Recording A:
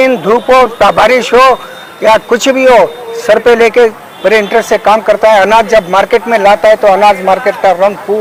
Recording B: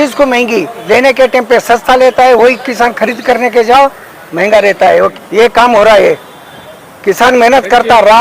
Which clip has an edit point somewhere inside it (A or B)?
B